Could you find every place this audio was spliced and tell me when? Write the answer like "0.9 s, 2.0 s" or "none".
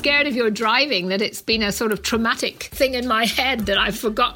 2.6 s